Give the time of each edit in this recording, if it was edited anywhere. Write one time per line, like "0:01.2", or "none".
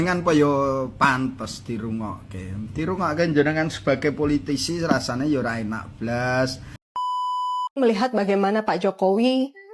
0:07.1